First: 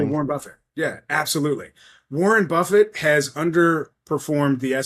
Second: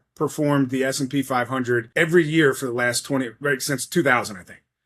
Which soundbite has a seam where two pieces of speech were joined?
second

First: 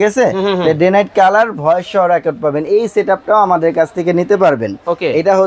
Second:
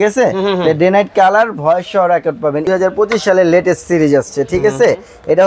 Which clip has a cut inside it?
second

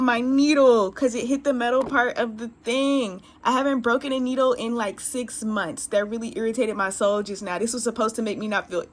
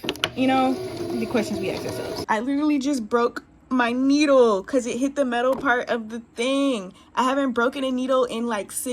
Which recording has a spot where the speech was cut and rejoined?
second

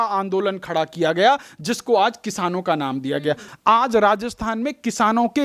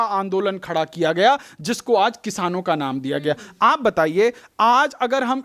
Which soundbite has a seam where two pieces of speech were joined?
first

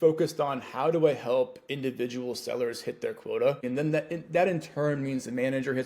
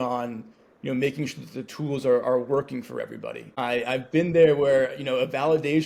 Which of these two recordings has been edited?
first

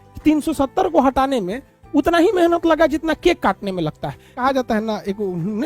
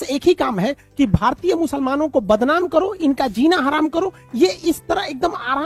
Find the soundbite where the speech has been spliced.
first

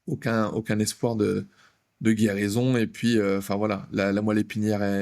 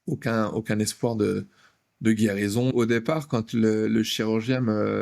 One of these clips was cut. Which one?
second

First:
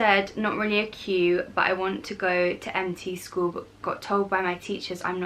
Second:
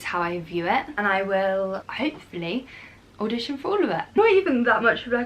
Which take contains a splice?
second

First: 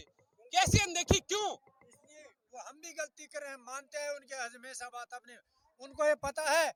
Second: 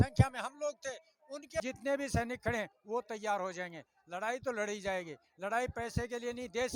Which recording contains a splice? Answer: second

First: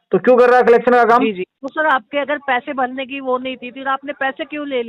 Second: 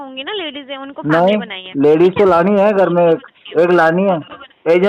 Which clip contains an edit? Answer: first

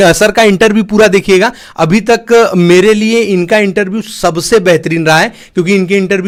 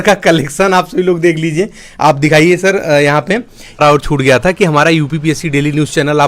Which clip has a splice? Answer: second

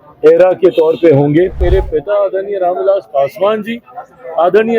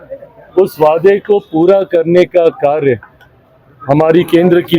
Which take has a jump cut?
first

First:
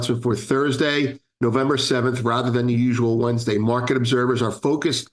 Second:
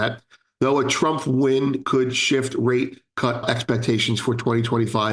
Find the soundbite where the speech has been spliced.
second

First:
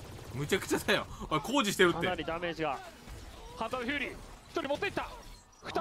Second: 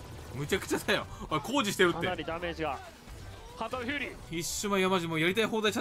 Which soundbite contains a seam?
second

